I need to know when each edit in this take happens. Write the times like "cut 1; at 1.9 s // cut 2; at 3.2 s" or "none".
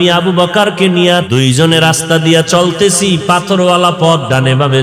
cut 1; at 1.3 s